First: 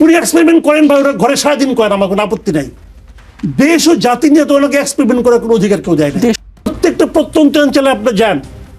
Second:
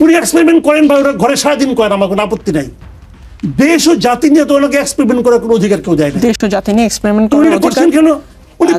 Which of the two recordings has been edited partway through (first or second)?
first